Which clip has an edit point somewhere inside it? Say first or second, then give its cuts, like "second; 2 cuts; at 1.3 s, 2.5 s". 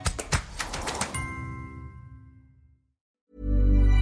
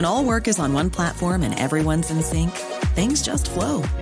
first; 1 cut; at 3.1 s